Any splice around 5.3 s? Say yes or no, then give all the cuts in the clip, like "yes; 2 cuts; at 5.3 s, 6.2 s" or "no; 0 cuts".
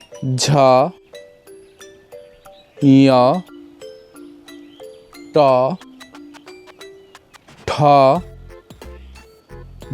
yes; 4 cuts; at 3.8 s, 5.3 s, 6.1 s, 7.6 s